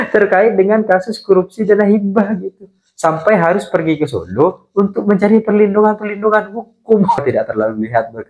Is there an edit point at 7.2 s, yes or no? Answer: yes